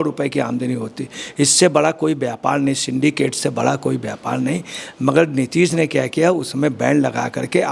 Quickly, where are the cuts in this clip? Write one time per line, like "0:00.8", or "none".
none